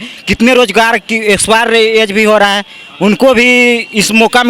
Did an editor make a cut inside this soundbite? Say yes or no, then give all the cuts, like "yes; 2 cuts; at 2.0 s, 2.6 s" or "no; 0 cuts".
no; 0 cuts